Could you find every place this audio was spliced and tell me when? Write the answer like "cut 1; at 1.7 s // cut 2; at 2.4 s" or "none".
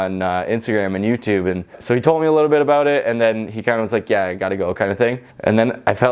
cut 1; at 1.8 s // cut 2; at 5.3 s